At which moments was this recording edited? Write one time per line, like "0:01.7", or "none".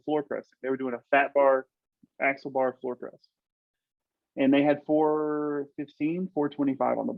none